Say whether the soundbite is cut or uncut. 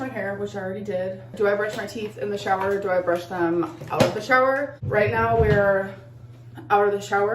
cut